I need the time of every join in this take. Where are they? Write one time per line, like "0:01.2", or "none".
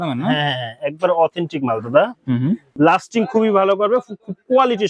0:02.7

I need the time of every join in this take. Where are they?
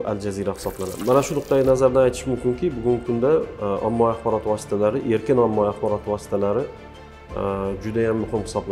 0:01.0

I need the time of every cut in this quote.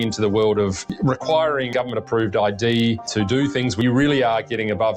0:00.8
0:01.7
0:03.8

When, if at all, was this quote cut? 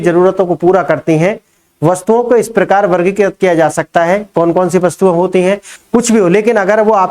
0:05.7

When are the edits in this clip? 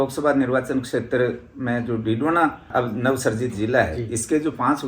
0:02.7

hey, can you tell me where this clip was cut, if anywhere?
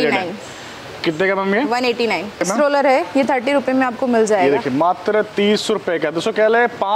0:02.4

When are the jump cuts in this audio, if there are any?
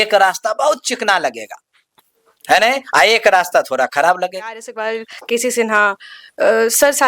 0:04.7

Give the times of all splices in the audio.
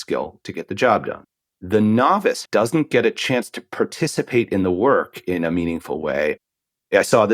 0:01.2
0:02.4
0:06.4

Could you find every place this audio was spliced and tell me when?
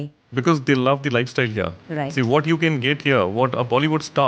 none

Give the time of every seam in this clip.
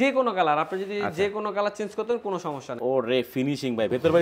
0:02.8

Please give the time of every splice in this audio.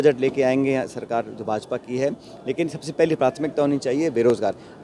none

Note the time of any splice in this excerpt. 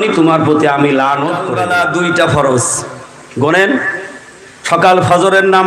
0:01.5

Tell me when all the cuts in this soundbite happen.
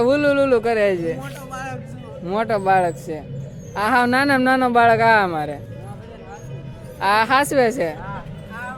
none

